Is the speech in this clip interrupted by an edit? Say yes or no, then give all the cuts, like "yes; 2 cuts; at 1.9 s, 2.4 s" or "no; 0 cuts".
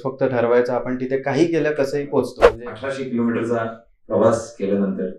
yes; 1 cut; at 2.5 s